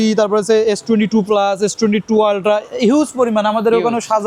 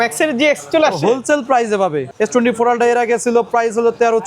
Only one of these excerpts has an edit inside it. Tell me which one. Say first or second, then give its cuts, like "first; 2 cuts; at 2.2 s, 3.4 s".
second; 1 cut; at 2.0 s